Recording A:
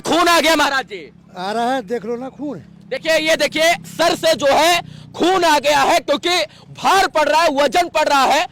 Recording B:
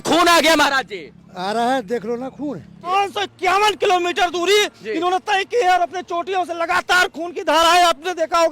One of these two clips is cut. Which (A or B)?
B